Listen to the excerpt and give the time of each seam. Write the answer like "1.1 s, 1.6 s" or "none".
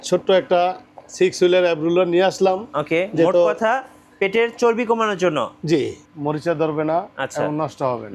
6.0 s